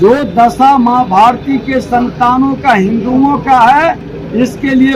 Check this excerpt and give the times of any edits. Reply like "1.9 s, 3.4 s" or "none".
none